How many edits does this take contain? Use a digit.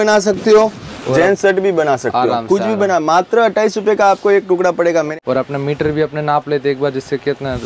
1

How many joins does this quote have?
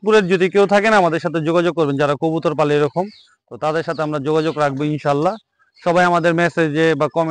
0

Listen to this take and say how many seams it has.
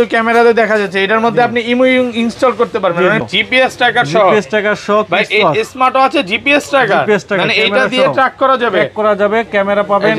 1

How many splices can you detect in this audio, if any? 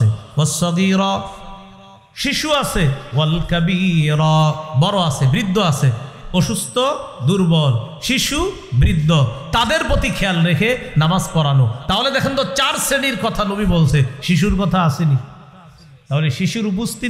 0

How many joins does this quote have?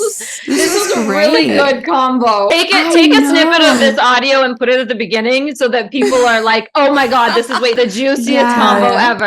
2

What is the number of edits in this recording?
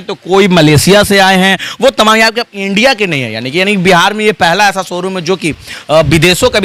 0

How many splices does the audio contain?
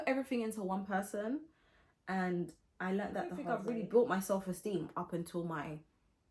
1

